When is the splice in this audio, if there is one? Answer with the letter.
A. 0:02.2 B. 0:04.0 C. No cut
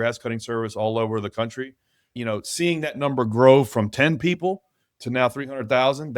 A